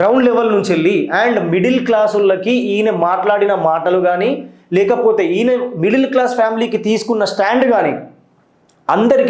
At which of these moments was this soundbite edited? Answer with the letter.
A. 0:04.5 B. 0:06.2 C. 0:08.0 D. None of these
D